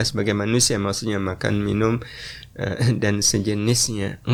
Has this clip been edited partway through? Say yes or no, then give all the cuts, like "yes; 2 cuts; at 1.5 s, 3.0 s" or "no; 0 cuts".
no; 0 cuts